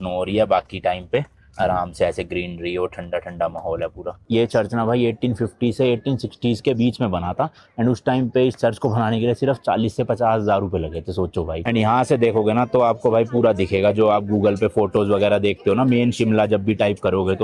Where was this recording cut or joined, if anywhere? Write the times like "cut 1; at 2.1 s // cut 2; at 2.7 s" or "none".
cut 1; at 4.2 s // cut 2; at 11.6 s